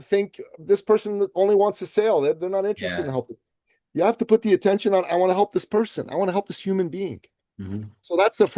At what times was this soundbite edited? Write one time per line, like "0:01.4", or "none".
none